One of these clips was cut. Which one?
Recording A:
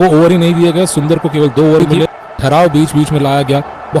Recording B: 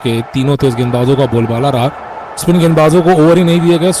A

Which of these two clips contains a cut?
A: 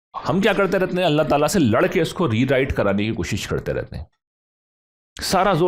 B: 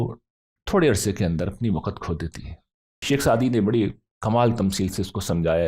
B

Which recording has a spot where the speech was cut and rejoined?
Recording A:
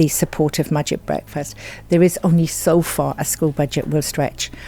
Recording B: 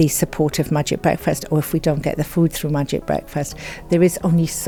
A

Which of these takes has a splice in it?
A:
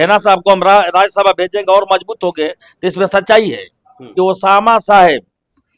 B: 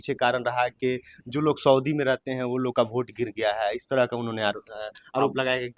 A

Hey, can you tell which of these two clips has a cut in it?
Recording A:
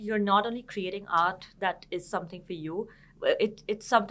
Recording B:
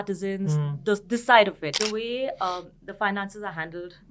B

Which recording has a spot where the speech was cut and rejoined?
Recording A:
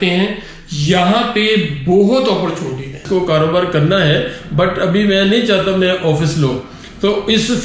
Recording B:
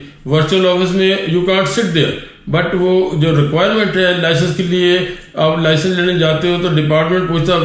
A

